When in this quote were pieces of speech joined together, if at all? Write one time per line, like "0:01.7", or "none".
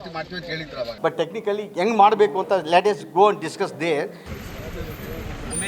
0:00.9
0:04.3